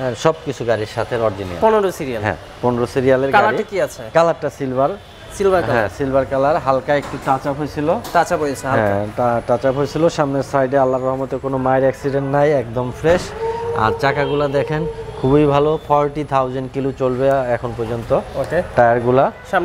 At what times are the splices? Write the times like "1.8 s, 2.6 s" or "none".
none